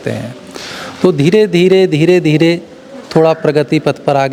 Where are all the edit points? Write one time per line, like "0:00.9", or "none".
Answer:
none